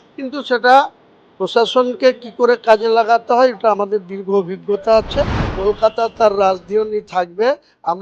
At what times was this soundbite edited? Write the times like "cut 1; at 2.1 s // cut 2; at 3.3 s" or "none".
cut 1; at 5.4 s